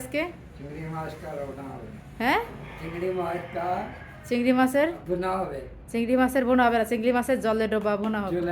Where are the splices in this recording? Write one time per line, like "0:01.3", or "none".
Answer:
none